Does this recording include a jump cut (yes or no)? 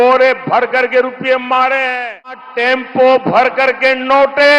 yes